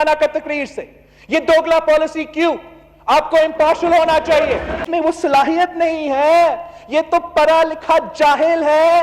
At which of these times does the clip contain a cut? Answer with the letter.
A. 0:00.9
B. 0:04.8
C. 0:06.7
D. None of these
B